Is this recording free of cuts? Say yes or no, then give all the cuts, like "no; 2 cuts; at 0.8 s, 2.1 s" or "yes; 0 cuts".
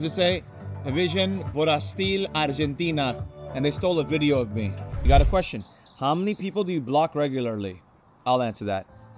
no; 1 cut; at 4.9 s